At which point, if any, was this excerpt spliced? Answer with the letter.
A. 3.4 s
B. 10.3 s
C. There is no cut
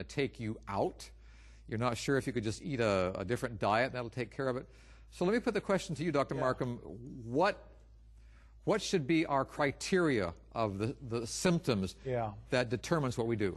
A